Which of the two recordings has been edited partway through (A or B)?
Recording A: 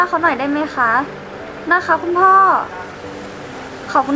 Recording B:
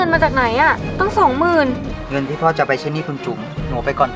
B